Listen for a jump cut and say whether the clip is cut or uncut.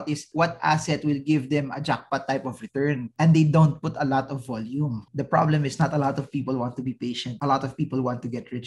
cut